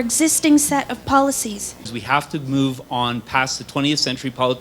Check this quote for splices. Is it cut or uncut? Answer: cut